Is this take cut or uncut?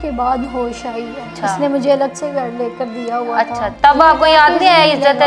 cut